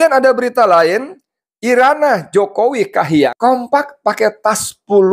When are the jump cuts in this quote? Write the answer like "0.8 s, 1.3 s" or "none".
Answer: 3.3 s